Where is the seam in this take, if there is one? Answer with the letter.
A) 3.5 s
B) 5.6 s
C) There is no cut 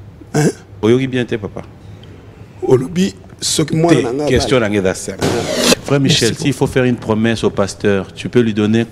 B